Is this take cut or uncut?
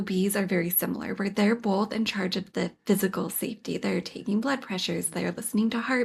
uncut